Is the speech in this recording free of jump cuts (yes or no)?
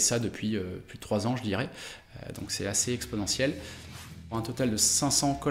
no